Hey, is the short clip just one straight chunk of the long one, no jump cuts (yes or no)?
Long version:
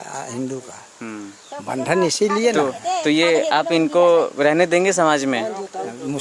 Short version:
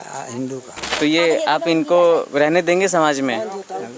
no